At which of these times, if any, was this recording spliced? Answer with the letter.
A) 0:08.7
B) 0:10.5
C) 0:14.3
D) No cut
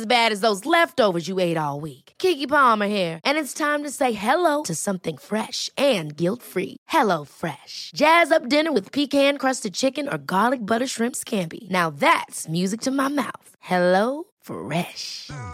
D